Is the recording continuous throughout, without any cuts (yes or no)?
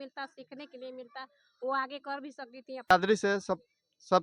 no